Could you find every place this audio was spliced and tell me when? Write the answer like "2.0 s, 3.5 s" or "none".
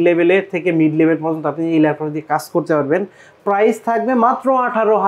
none